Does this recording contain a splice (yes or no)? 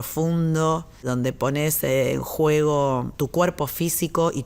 yes